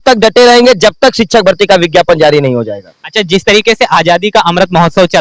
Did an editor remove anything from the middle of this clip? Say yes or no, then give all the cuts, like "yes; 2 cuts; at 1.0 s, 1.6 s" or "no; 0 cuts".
no; 0 cuts